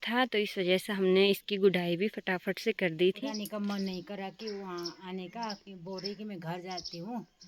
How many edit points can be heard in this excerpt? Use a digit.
1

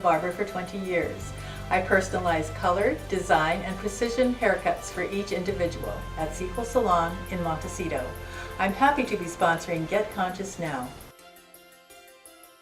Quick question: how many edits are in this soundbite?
1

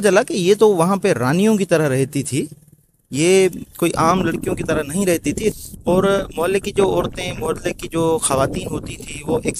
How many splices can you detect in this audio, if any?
1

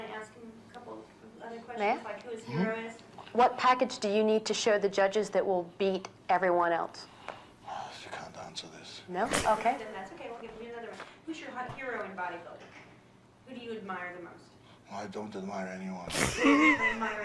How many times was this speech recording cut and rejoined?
0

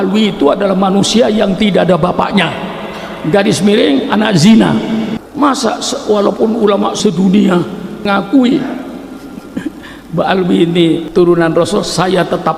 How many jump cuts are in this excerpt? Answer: 4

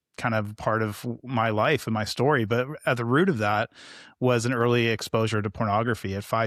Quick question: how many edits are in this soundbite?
0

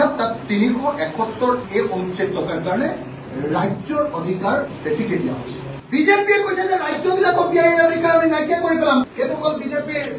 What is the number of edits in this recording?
3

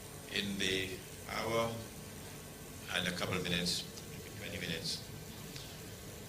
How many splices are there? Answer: 1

